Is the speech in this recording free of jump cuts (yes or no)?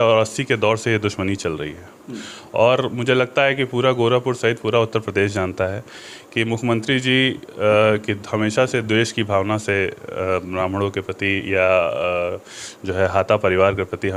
yes